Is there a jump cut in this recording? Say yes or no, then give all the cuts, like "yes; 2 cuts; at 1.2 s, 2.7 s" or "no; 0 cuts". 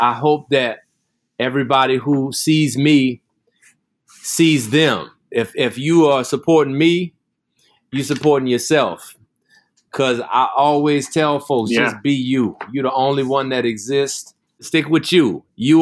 yes; 1 cut; at 14.6 s